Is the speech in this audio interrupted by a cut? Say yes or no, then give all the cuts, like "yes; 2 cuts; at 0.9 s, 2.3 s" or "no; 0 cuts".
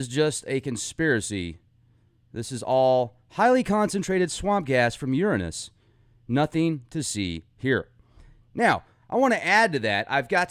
no; 0 cuts